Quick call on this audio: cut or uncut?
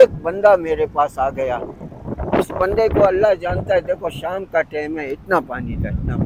uncut